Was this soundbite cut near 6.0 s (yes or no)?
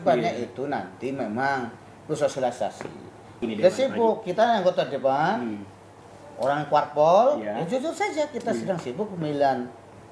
no